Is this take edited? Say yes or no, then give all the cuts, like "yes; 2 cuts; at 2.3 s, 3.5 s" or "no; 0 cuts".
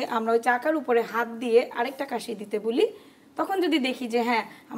no; 0 cuts